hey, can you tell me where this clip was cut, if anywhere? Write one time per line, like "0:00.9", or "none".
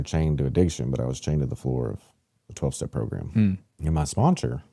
0:03.7